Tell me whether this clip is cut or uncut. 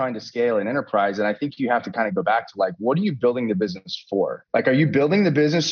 cut